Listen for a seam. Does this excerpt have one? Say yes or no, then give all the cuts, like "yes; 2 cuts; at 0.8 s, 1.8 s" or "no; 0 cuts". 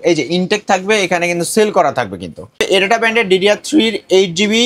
yes; 1 cut; at 2.6 s